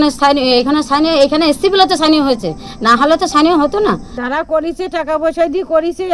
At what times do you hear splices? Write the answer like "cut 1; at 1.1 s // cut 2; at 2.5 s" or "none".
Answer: cut 1; at 4.1 s